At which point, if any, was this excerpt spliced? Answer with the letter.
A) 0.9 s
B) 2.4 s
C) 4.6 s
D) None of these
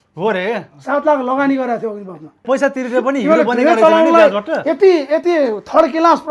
B